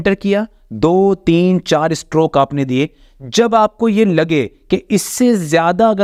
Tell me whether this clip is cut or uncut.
uncut